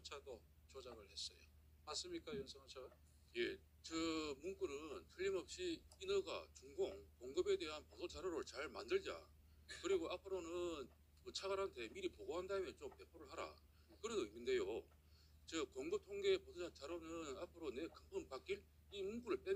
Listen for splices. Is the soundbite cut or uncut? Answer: uncut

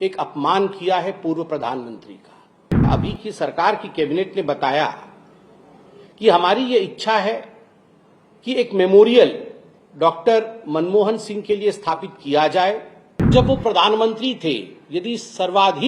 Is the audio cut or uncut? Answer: cut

